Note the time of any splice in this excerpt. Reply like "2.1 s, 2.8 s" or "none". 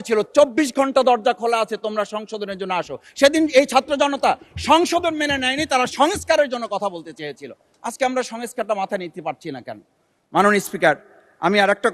none